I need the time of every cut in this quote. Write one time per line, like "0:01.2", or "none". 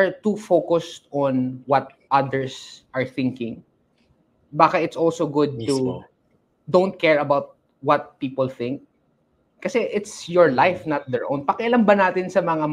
none